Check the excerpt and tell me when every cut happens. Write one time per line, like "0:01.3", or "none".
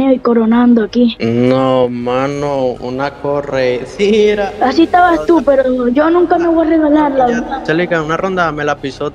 0:01.2